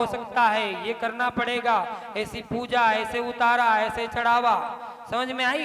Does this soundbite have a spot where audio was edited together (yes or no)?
no